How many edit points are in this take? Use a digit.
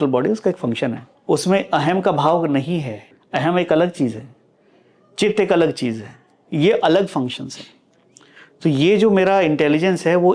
2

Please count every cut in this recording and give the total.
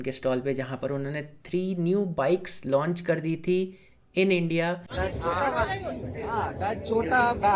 1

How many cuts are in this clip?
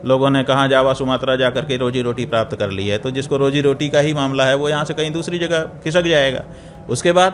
0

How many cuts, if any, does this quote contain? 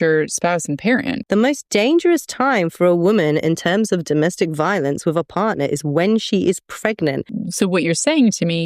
2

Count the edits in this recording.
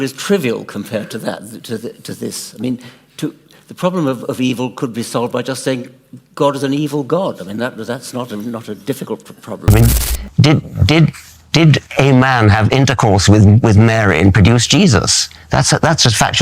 1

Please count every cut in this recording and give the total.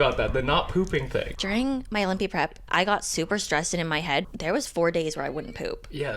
2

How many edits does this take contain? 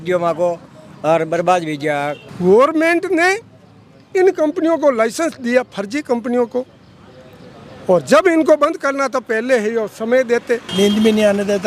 2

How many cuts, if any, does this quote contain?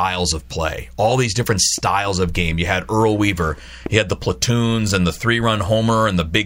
0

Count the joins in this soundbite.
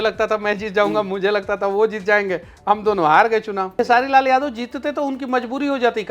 1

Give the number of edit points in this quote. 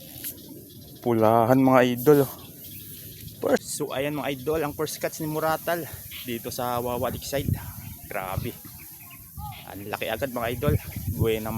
1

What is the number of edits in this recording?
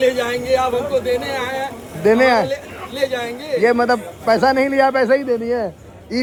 0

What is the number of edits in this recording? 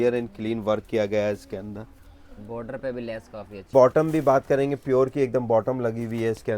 1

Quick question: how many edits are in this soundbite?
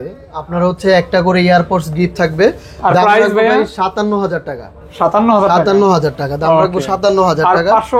0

